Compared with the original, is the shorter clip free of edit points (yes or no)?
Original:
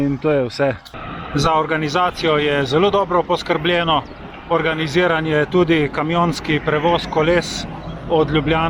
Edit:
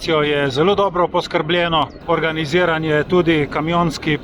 no